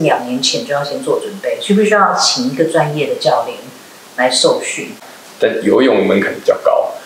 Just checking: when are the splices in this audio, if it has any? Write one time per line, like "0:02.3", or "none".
0:05.0